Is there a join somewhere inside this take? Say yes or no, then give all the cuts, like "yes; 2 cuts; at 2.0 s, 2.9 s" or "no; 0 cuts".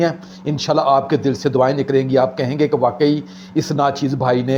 no; 0 cuts